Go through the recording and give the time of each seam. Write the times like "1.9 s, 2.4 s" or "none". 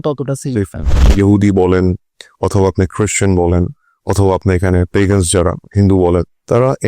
1.1 s